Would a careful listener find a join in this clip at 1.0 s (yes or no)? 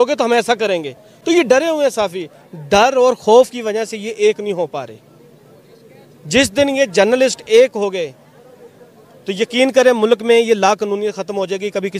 no